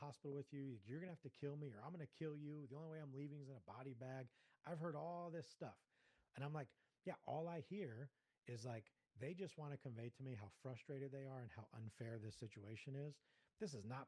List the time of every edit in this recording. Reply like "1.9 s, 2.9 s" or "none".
none